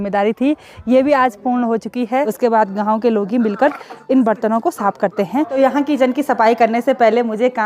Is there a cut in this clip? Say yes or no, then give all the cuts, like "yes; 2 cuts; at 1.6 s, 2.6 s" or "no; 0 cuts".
yes; 2 cuts; at 2.3 s, 5.5 s